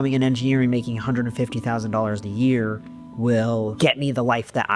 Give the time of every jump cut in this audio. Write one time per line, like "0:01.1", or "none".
0:03.7